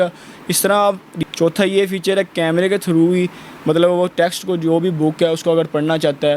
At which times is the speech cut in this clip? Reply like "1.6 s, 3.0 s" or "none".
1.1 s